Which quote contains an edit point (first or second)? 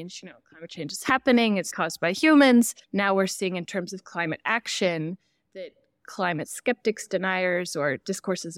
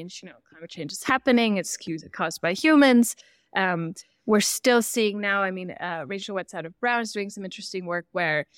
first